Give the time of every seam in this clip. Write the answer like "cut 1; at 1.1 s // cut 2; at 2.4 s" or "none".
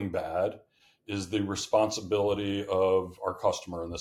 none